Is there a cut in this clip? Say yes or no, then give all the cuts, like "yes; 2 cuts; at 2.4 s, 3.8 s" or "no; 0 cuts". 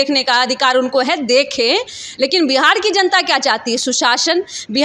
no; 0 cuts